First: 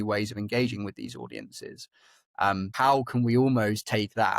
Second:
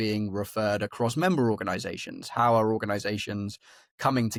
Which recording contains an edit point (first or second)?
first